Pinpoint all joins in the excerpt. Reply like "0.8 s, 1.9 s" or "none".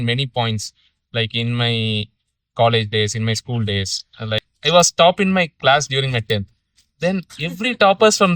4.5 s